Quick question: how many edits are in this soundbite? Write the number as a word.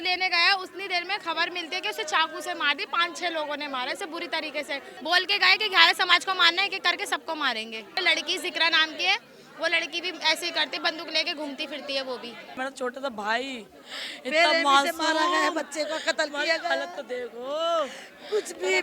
three